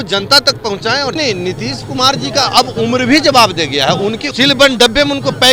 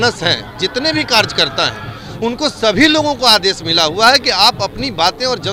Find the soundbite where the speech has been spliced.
first; 2 cuts; at 1.2 s, 4.2 s

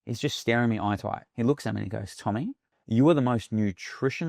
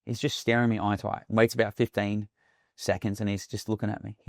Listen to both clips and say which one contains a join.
first; 2 cuts; at 1.2 s, 2.7 s

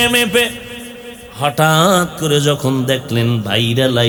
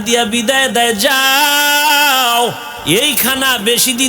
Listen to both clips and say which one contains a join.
second; 1 cut; at 2.7 s

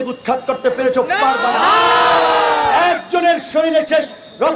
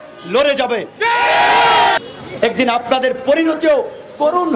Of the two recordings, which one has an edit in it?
second; 1 cut; at 2.0 s

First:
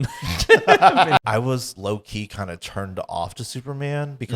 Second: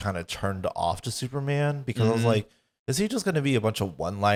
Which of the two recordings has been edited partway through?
first; 1 cut; at 1.2 s

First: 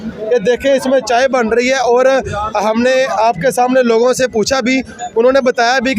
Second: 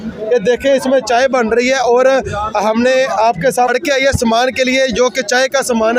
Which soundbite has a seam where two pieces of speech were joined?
second; 1 cut; at 3.7 s

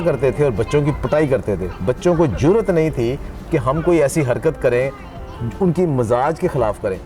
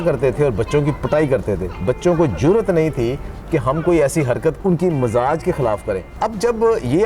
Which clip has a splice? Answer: second; 2 cuts; at 4.6 s, 6.1 s

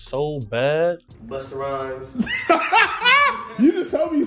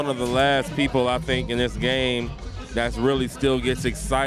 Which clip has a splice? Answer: first; 1 cut; at 1.0 s

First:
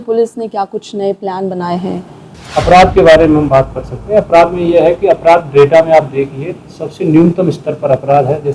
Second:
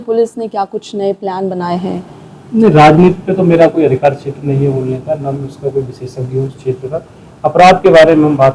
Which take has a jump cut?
first; 1 cut; at 2.3 s

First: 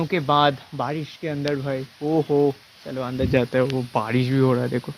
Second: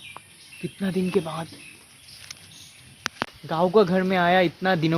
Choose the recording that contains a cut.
second; 1 cut; at 3.3 s

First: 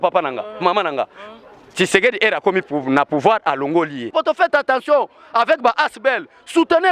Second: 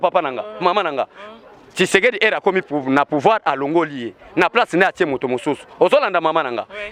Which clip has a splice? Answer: first; 1 cut; at 4.1 s

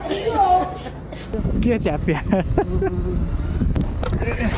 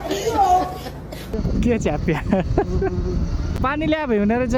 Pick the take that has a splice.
first; 1 cut; at 3.6 s

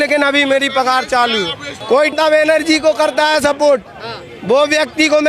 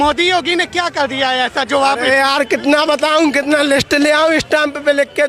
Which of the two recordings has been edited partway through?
first; 1 cut; at 2.1 s

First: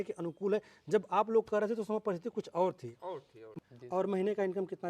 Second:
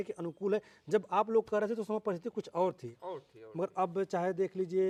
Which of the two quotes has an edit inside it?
first; 1 cut; at 3.5 s

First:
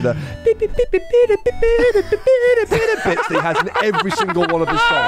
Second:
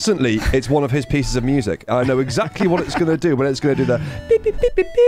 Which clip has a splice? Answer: second; 1 cut; at 1.9 s

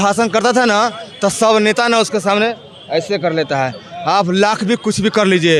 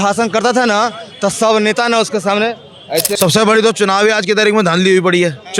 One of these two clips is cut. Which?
second; 1 cut; at 3.1 s

